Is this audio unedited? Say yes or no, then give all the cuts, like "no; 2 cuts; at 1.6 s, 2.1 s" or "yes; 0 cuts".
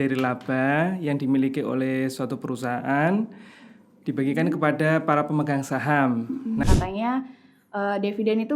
no; 1 cut; at 6.6 s